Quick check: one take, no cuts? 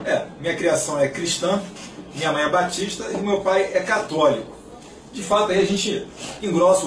yes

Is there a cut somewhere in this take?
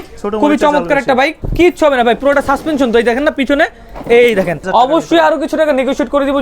yes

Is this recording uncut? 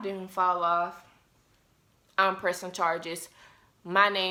yes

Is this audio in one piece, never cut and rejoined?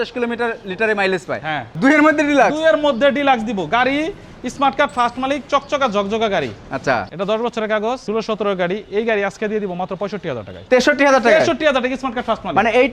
no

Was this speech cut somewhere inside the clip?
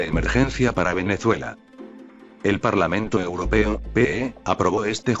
no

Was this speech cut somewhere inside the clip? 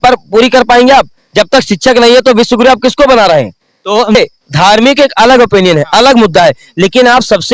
yes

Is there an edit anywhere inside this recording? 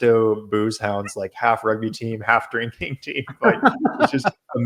no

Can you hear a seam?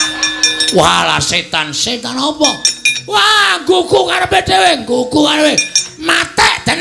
no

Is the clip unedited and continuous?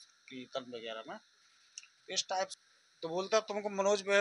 no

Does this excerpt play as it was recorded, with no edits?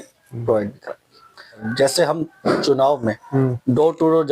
no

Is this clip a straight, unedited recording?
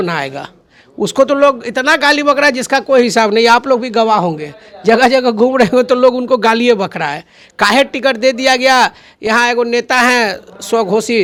yes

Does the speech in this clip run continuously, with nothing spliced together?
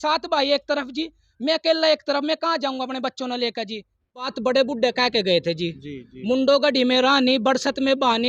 no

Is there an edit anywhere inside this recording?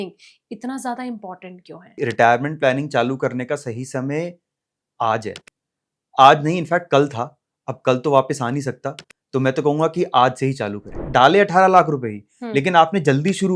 yes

